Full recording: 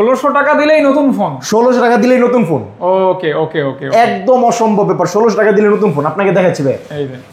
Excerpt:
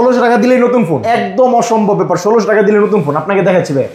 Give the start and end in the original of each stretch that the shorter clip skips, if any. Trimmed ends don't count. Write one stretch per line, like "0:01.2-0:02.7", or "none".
0:02.6-0:03.9